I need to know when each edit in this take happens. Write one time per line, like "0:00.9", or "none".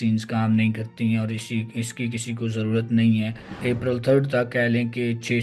0:03.6